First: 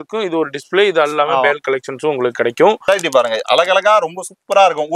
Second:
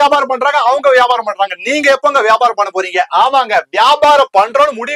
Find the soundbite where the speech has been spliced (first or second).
first